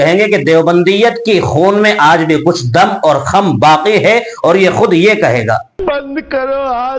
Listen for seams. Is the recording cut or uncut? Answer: cut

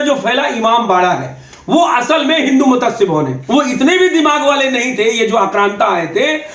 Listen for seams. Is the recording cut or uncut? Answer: cut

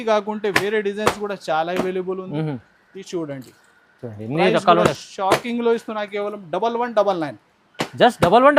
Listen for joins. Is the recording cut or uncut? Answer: uncut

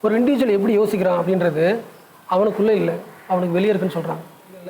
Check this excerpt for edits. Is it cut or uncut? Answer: uncut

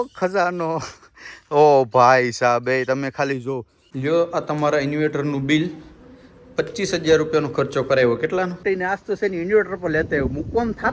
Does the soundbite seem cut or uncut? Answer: cut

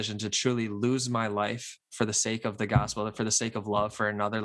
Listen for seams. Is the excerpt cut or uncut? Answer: uncut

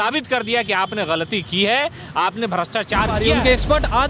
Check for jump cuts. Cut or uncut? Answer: cut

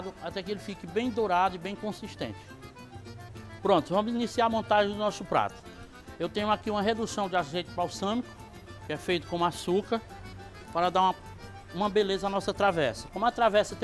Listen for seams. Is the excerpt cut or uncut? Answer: uncut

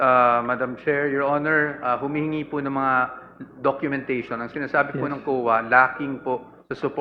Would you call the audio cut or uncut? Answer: uncut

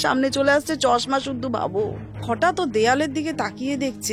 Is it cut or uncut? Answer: cut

